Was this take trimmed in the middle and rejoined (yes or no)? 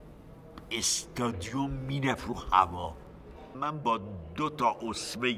yes